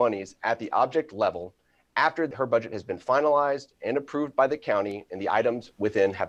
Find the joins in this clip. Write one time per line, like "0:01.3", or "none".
0:02.3